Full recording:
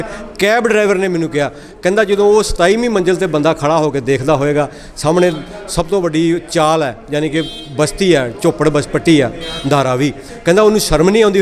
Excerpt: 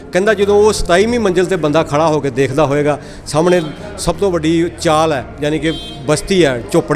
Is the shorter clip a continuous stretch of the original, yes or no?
yes